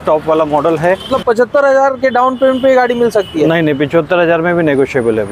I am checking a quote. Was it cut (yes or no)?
yes